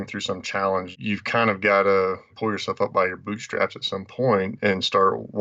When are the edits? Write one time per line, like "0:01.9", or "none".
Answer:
0:00.9